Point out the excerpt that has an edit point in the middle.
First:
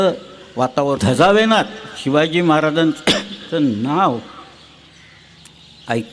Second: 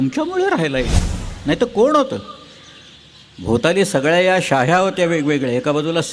first; 1 cut; at 1.0 s

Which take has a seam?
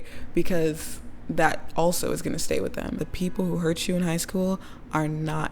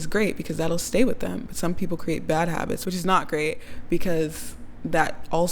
first; 1 cut; at 2.9 s

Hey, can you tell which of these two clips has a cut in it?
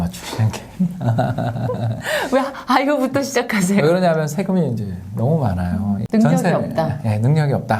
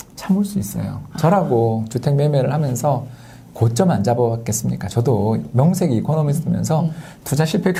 first; 1 cut; at 6.0 s

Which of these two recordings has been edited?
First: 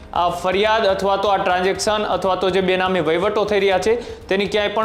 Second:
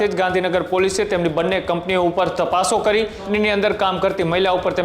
second; 1 cut; at 3.2 s

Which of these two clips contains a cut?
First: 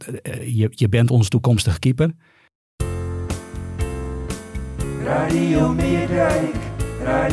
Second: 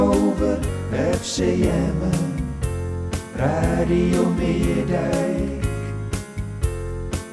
first; 1 cut; at 2.4 s

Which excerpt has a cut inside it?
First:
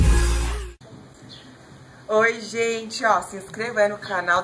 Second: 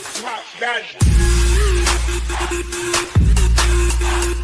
first; 1 cut; at 1.0 s

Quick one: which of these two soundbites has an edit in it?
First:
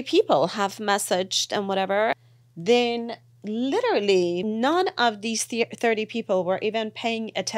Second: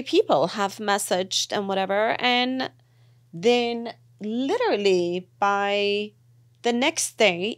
first; 2 cuts; at 2.2 s, 4.4 s

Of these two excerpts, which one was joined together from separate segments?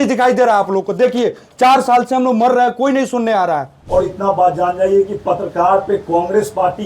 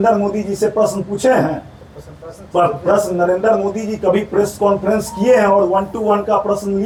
first; 1 cut; at 3.8 s

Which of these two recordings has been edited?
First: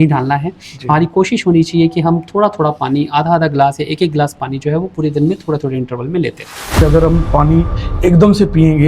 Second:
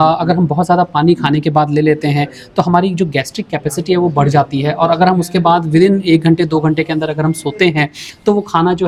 first; 1 cut; at 6.8 s

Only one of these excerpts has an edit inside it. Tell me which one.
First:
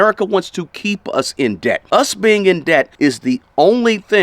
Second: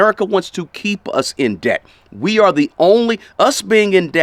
first; 2 cuts; at 1.8 s, 2.9 s

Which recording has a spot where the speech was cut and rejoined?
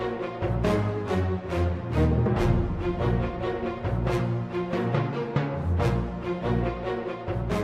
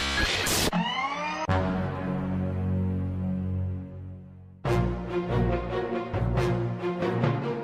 first; 1 cut; at 1.0 s

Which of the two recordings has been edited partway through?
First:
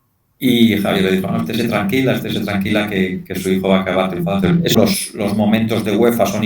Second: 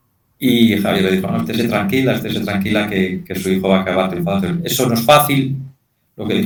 first; 1 cut; at 4.8 s

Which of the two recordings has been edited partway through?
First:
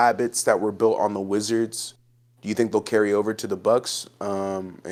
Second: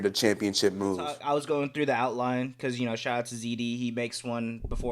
second; 1 cut; at 1.2 s

